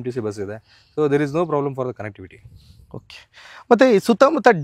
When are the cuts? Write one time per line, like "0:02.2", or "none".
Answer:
none